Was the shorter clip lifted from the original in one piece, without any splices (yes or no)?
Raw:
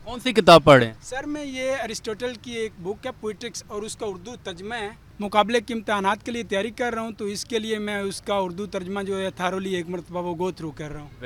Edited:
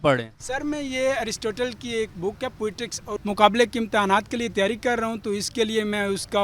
no